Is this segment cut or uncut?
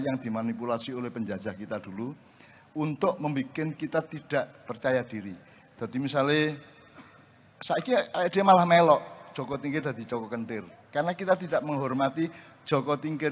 uncut